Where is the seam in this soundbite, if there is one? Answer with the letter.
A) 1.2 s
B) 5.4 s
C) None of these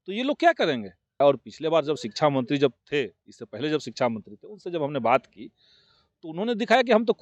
A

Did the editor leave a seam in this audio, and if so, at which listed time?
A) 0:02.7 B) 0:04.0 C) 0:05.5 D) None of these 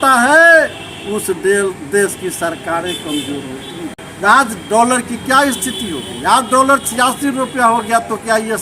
B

